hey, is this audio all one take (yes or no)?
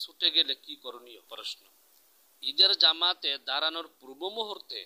no